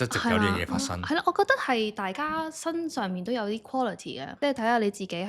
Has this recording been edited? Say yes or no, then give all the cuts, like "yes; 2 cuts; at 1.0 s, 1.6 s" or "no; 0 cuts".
yes; 1 cut; at 4.2 s